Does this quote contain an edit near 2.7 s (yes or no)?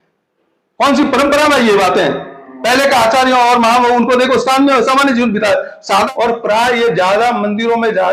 no